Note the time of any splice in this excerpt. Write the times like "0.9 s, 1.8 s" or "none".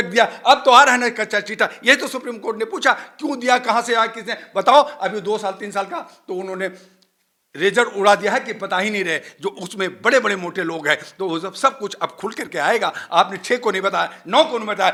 none